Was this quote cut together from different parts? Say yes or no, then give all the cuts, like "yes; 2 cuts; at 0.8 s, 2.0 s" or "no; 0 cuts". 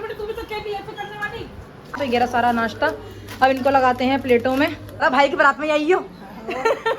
yes; 2 cuts; at 2.0 s, 5.0 s